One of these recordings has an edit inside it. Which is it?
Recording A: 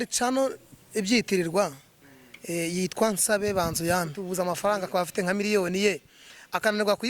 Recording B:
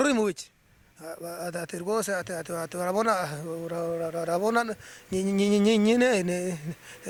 A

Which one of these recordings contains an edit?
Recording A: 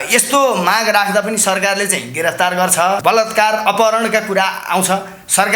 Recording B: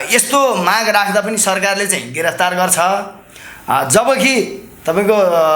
A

